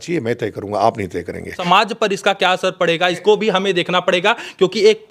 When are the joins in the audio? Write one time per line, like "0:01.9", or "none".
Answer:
0:01.7
0:03.2